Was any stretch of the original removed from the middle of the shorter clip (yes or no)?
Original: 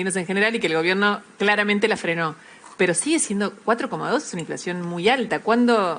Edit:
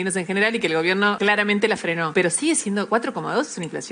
yes